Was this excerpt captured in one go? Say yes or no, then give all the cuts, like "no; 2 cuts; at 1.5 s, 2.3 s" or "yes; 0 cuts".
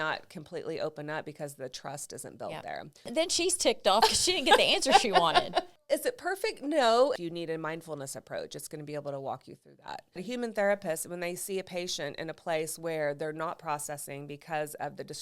no; 4 cuts; at 3.1 s, 5.7 s, 7.1 s, 10.2 s